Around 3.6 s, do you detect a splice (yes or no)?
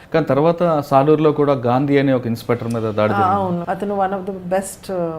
yes